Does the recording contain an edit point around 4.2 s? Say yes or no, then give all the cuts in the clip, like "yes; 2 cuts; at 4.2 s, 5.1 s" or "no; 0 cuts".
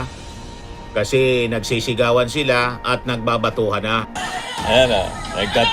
yes; 1 cut; at 4.2 s